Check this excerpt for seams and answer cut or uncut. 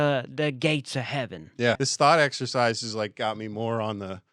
cut